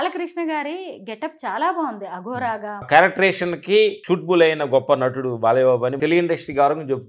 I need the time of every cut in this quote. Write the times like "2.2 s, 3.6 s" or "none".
2.9 s, 6.0 s

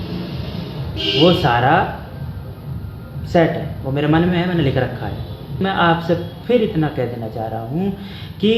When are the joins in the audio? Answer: 5.6 s

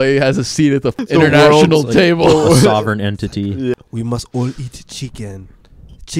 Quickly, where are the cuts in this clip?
1.0 s, 3.7 s

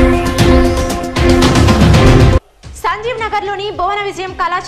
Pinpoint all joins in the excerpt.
2.3 s

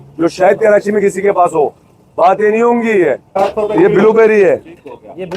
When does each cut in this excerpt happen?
3.4 s

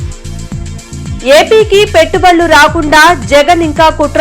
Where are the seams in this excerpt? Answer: 1.2 s

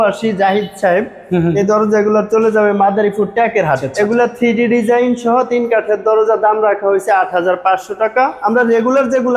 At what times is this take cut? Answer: 3.9 s, 8.4 s

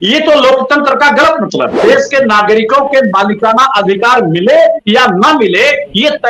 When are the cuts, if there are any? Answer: 1.8 s

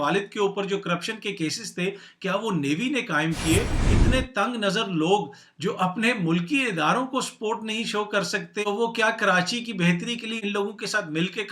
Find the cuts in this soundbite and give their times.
3.8 s

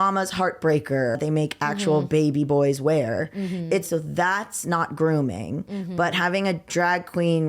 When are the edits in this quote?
1.2 s, 3.9 s

